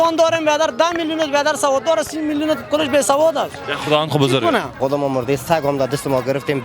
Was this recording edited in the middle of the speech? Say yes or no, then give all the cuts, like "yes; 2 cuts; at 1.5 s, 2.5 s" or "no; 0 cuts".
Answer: yes; 1 cut; at 4.8 s